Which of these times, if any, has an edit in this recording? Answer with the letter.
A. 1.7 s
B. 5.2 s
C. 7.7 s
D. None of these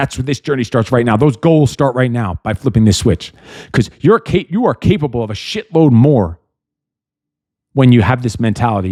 D